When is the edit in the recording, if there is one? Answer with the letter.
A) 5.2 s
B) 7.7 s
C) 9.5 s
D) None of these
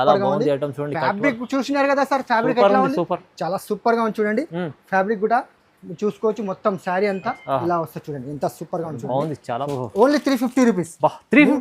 C